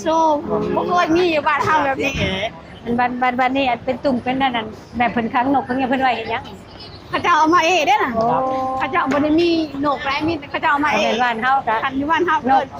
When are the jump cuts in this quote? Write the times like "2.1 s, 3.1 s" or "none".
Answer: none